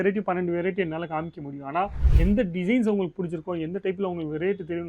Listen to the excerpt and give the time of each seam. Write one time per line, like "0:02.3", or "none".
0:02.0